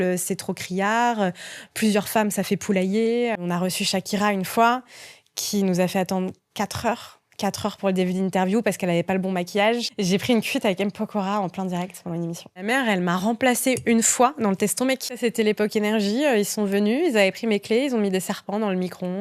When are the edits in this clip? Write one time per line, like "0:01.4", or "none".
0:03.4
0:09.9
0:12.6
0:15.2